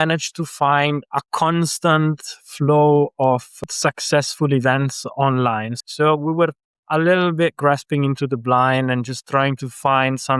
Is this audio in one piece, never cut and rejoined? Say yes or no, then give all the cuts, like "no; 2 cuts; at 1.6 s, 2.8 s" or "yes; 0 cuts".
no; 3 cuts; at 1.1 s, 3.5 s, 5.7 s